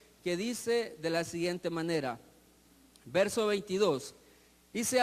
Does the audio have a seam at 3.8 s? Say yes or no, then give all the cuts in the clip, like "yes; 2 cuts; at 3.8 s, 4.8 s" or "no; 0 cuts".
yes; 1 cut; at 3.8 s